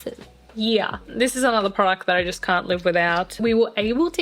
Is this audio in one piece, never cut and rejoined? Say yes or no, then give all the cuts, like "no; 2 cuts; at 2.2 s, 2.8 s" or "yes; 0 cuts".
no; 2 cuts; at 1.0 s, 3.4 s